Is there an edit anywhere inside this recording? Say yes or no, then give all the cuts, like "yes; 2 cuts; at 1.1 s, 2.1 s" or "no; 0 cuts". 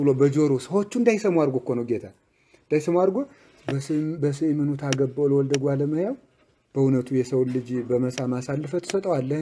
no; 0 cuts